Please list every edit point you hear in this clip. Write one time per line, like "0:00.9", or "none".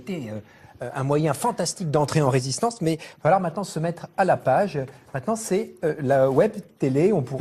0:02.4

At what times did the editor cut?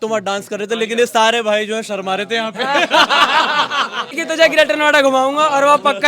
0:04.2

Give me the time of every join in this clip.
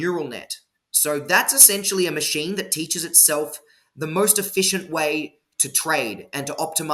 none

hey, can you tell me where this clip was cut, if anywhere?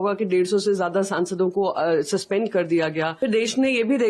0:03.1

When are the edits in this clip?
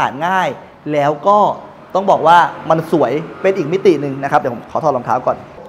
none

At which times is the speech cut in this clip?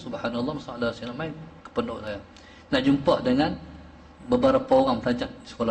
none

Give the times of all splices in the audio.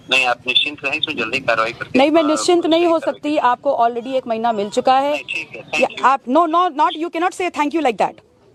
none

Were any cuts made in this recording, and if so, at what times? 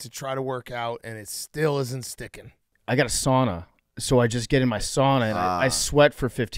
0:02.7

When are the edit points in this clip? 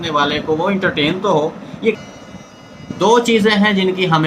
0:02.0

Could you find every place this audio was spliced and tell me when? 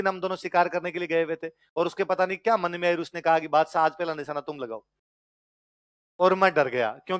none

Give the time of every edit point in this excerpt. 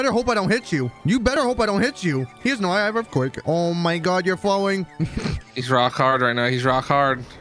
0:01.3
0:03.4

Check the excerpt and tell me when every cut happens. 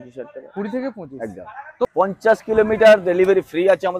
0:01.9

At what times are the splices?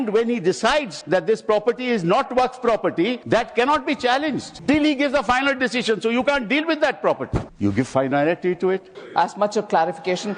0:01.0
0:03.2
0:04.5
0:07.4
0:09.0

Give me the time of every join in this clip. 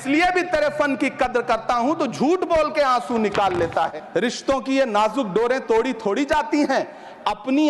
0:04.0

